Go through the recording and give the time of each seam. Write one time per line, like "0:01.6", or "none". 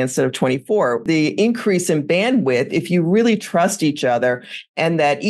0:01.0

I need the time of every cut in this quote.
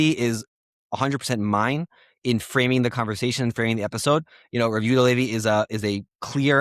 none

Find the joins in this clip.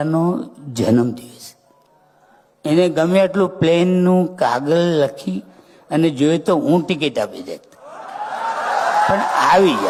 none

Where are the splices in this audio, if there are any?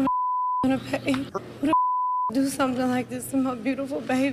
0:01.3

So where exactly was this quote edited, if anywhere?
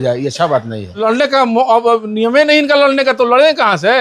0:01.0

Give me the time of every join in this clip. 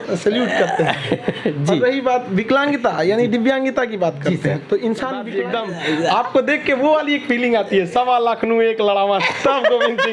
0:05.3

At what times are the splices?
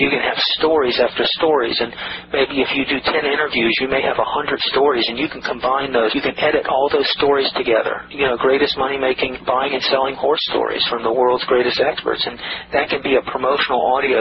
0:06.1

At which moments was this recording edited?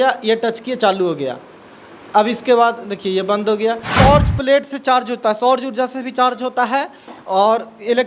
0:03.9

